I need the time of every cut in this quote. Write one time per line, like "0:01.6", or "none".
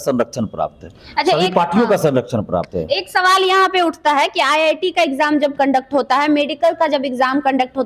none